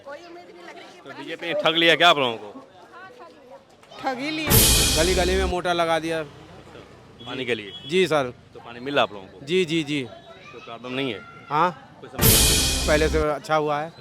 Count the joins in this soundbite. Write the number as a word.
one